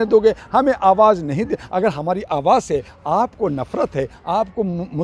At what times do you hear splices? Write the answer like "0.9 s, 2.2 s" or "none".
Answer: none